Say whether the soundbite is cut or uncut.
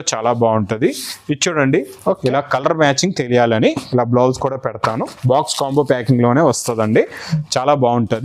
cut